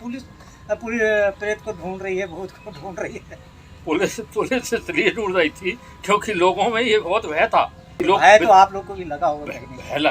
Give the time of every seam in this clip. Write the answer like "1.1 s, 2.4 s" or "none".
7.9 s